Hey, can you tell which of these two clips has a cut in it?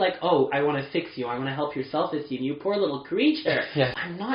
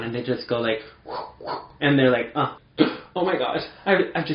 second; 1 cut; at 2.5 s

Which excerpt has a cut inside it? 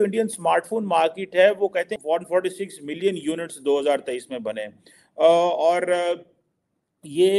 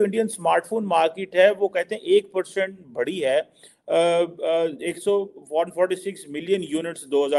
first; 1 cut; at 1.9 s

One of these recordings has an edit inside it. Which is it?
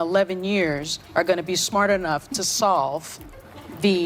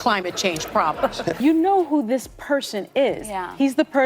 second; 1 cut; at 1.4 s

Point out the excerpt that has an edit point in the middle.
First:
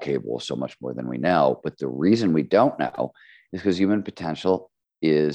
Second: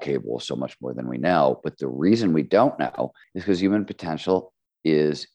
second; 1 cut; at 3.3 s

